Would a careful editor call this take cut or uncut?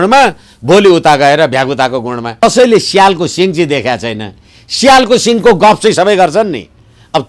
cut